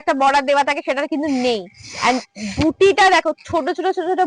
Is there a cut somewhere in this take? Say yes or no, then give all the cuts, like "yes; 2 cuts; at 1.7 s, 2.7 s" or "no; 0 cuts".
no; 0 cuts